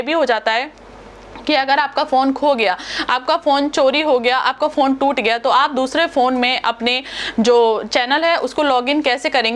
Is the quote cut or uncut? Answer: uncut